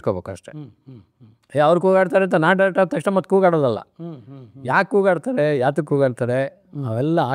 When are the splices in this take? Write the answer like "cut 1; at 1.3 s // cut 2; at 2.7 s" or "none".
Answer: none